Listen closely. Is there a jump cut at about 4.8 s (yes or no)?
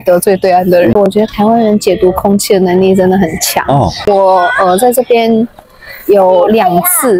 no